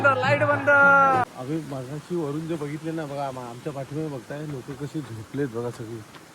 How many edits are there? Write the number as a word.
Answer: one